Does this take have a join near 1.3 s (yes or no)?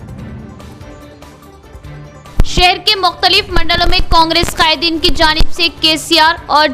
yes